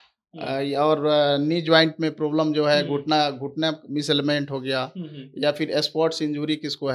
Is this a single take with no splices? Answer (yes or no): yes